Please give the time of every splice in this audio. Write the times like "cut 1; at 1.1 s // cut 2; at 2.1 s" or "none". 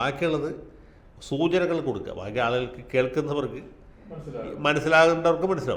none